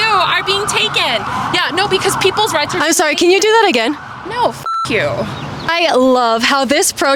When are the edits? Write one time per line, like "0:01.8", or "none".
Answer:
none